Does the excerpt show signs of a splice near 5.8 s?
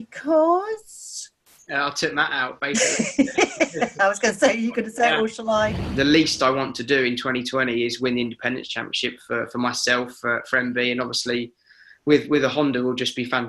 yes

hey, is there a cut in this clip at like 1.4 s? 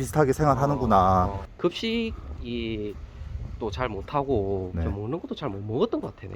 yes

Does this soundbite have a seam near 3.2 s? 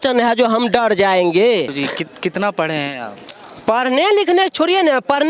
no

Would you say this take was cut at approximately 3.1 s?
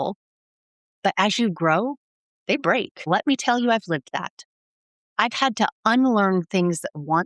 yes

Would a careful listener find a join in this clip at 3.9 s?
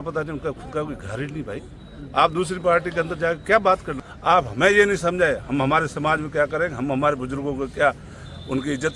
yes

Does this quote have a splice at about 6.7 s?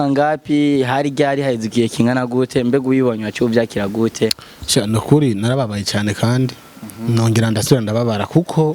no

